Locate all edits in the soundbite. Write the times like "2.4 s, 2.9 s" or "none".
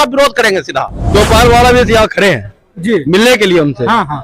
1.0 s